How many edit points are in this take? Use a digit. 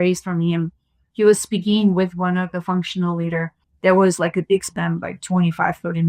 1